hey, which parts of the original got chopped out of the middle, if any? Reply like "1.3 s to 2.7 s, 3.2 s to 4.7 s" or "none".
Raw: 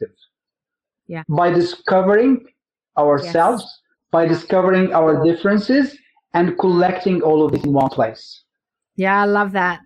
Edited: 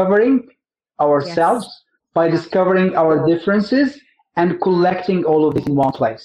none